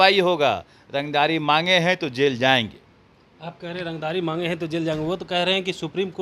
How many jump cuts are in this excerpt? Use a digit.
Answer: 0